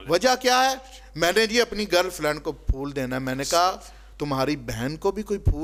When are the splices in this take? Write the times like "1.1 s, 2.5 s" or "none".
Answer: none